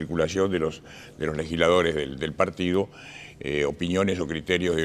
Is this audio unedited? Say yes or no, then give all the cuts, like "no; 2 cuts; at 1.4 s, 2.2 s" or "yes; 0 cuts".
no; 1 cut; at 3.2 s